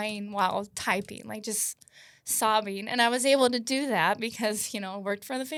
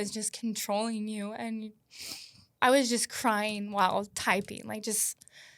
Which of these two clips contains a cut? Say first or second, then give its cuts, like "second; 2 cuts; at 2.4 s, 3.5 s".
second; 1 cut; at 2.5 s